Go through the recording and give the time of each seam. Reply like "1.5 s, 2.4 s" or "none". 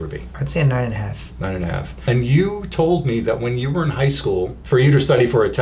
4.6 s